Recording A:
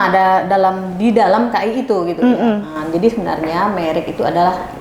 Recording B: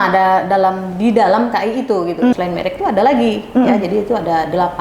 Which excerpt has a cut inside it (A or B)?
B